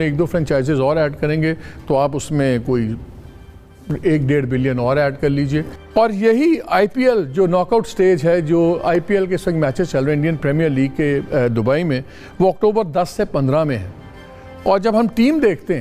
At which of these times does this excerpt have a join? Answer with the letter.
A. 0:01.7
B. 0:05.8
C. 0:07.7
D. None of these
B